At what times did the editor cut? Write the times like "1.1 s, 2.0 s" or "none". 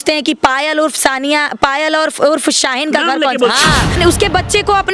3.9 s